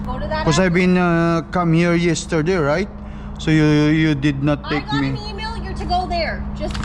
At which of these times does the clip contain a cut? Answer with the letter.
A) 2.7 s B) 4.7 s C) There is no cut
C